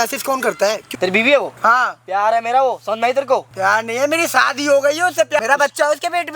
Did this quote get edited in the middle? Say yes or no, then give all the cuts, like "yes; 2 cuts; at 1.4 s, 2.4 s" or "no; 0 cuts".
yes; 3 cuts; at 0.9 s, 3.5 s, 5.4 s